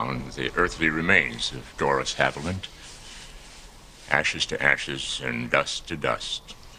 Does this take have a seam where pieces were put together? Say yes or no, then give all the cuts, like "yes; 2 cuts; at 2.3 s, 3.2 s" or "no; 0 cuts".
no; 0 cuts